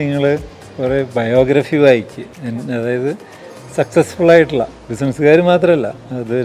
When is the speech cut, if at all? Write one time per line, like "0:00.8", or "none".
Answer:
none